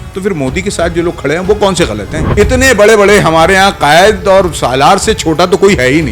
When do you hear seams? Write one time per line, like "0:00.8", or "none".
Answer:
0:02.2